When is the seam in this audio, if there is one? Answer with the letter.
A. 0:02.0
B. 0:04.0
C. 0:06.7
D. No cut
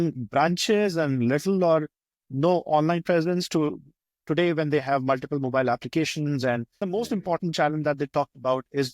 C